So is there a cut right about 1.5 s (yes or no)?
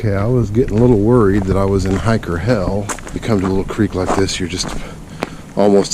no